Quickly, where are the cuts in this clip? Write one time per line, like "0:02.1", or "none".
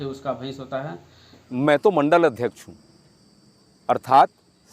0:01.5